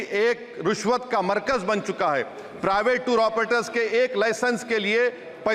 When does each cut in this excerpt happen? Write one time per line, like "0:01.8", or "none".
none